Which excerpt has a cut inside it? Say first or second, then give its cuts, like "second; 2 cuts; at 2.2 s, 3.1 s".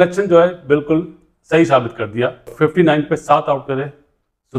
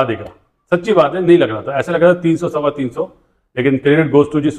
first; 1 cut; at 2.4 s